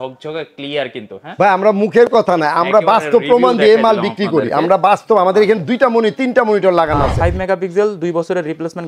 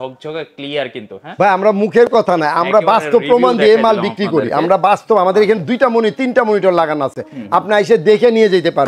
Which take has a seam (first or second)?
first